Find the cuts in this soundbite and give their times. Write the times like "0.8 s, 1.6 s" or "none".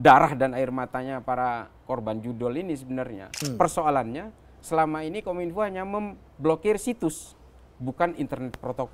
3.3 s

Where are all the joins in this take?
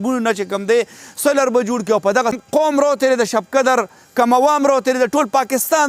2.4 s

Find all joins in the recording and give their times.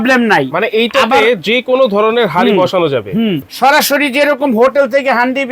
3.5 s

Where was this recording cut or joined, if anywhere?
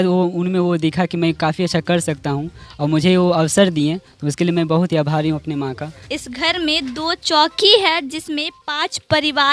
6.0 s

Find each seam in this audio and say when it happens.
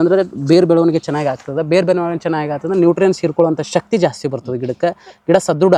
none

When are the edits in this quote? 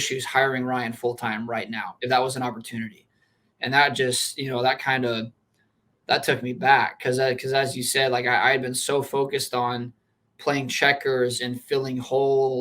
1.9 s

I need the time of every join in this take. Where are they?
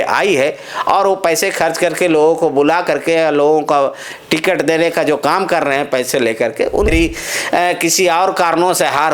6.9 s

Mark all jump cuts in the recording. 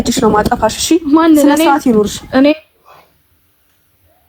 none

